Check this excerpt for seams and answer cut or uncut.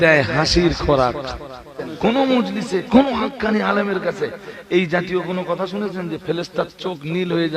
cut